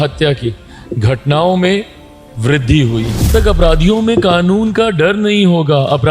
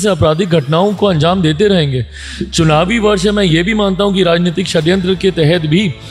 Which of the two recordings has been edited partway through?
first; 1 cut; at 3.3 s

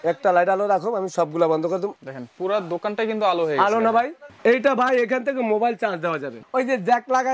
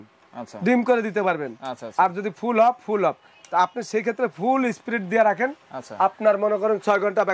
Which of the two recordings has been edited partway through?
first; 3 cuts; at 1.9 s, 4.2 s, 6.3 s

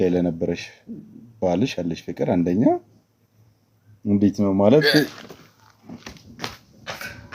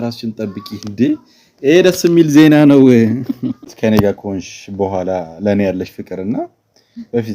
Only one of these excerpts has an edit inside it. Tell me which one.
second; 1 cut; at 3.7 s

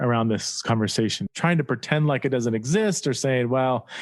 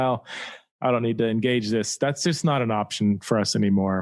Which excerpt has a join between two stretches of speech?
first; 1 cut; at 1.2 s

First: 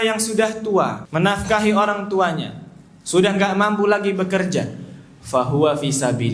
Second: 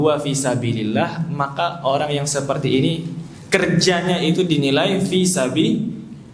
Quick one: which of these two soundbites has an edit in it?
first; 1 cut; at 1.0 s

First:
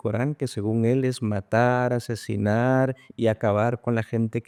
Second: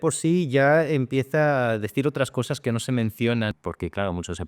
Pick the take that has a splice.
second; 1 cut; at 3.5 s

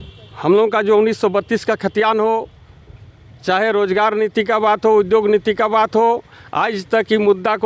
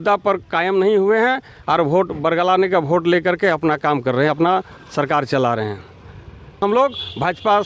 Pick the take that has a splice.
second; 1 cut; at 6.6 s

